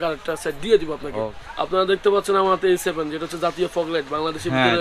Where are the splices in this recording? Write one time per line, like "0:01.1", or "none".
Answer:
0:01.4